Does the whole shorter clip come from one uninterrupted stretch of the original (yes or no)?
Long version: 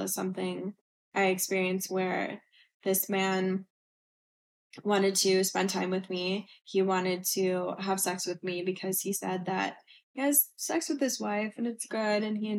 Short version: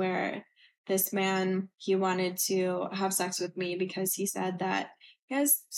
no